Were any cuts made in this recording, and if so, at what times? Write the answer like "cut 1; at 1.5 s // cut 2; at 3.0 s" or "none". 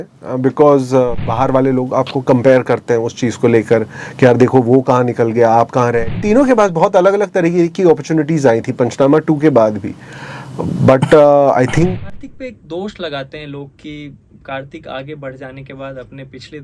cut 1; at 1.3 s // cut 2; at 6.1 s // cut 3; at 12.0 s

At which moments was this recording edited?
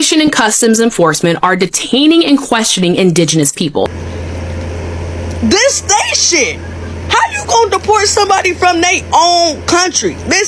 cut 1; at 4.0 s

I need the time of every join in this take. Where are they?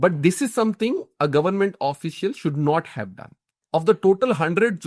cut 1; at 3.6 s

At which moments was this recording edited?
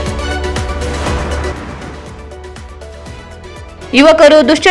cut 1; at 3.7 s

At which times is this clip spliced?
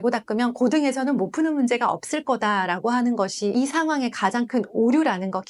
none

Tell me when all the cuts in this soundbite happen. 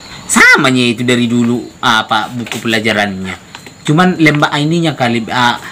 none

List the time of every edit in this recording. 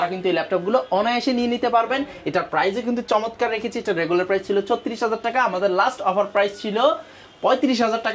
none

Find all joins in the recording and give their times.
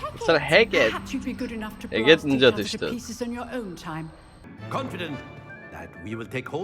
cut 1; at 4.5 s

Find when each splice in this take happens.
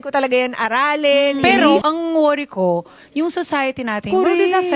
cut 1; at 1.8 s

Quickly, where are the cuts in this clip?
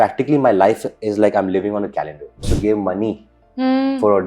cut 1; at 2.5 s

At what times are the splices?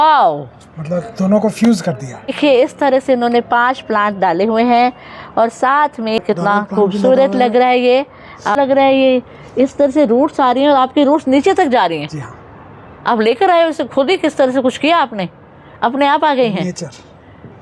cut 1; at 2.3 s // cut 2; at 6.2 s // cut 3; at 8.6 s

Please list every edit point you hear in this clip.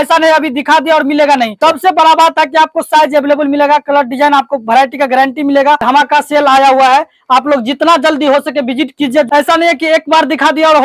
cut 1; at 1.5 s // cut 2; at 5.8 s // cut 3; at 9.3 s

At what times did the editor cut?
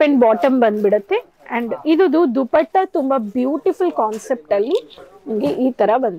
none

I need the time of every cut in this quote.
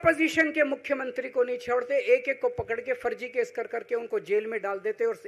none

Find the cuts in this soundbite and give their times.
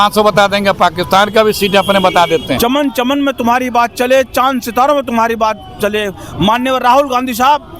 cut 1; at 2.6 s

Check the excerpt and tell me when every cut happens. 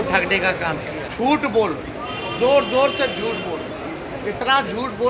cut 1; at 1.1 s

